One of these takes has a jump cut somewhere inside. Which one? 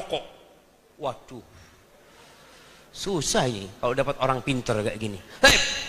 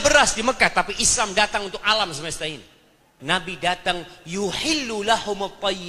second; 1 cut; at 3.1 s

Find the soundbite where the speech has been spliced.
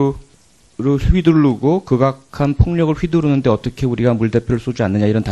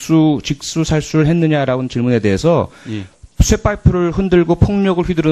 second; 1 cut; at 3.5 s

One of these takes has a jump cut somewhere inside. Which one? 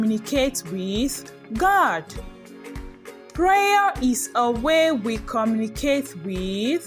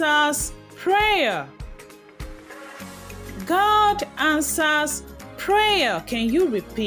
first; 2 cuts; at 2.1 s, 3.4 s

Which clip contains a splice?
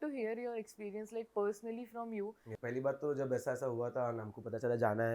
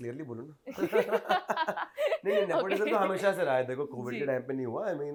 first; 1 cut; at 2.5 s

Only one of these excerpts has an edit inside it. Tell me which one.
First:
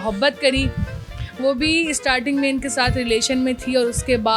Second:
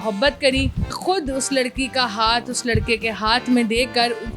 second; 1 cut; at 0.9 s

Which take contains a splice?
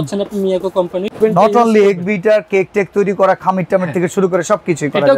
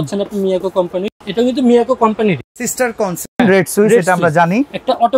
first; 1 cut; at 1.2 s

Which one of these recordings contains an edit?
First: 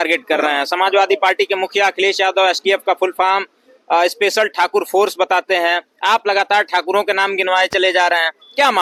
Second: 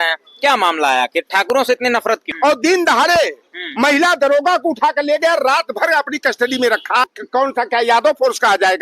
second; 2 cuts; at 2.3 s, 7.2 s

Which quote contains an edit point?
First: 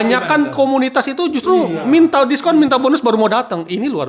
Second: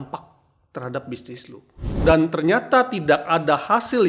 second; 1 cut; at 1.9 s

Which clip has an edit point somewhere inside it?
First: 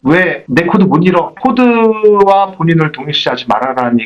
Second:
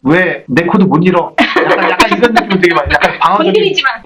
first; 1 cut; at 1.3 s

